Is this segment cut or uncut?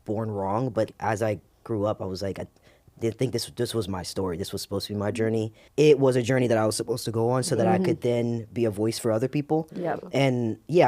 cut